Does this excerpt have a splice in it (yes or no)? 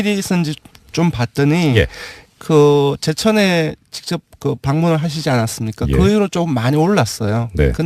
yes